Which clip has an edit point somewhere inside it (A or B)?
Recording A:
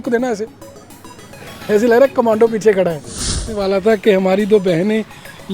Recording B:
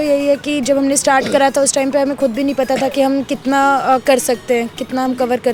A